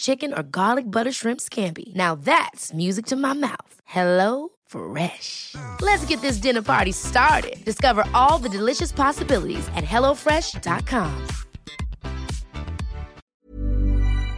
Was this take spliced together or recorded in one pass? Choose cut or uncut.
cut